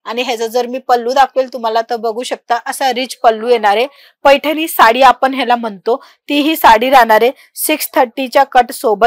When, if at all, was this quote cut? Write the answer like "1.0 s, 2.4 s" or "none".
none